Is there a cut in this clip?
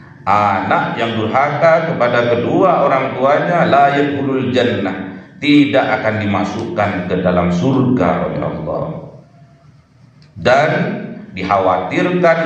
no; 0 cuts

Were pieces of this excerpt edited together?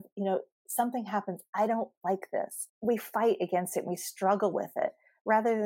yes; 1 cut; at 2.6 s

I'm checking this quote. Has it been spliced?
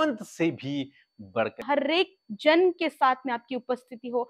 yes; 1 cut; at 1.6 s

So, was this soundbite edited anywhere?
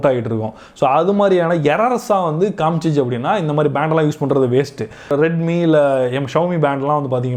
no; 0 cuts

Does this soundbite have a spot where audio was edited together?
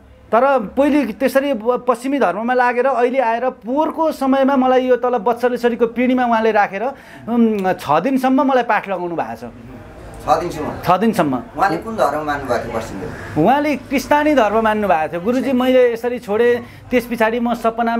no; 0 cuts

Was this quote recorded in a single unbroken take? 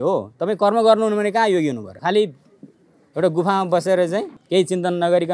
no; 2 cuts; at 1.9 s, 4.4 s

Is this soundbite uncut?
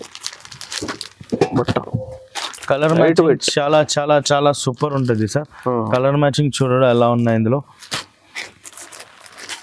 yes; 0 cuts

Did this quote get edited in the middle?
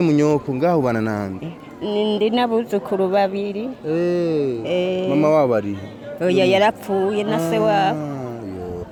no; 0 cuts

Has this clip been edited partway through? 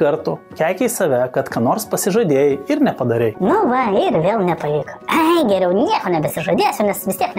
no; 0 cuts

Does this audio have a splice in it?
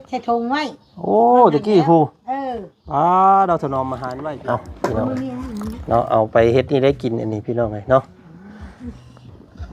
yes; 1 cut; at 4.0 s

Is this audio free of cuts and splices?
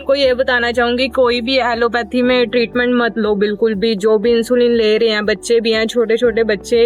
yes; 0 cuts

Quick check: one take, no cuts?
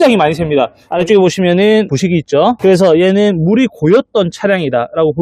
no; 2 cuts; at 0.9 s, 2.4 s

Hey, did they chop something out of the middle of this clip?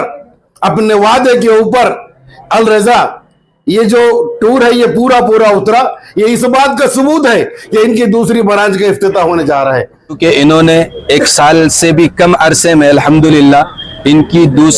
yes; 1 cut; at 10.2 s

